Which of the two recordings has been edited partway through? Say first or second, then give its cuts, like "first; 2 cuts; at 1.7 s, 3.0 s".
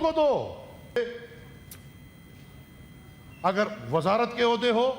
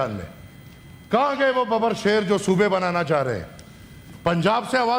first; 1 cut; at 1.0 s